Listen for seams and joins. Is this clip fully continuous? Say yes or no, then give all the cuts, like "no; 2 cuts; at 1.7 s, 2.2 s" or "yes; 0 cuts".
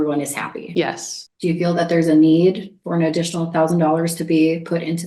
no; 1 cut; at 1.3 s